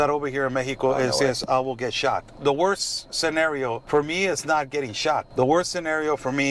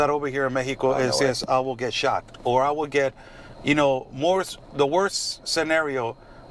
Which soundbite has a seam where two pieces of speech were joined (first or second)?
first